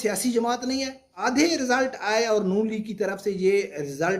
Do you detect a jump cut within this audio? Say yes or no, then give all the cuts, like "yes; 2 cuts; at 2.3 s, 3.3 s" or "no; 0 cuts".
yes; 1 cut; at 1.1 s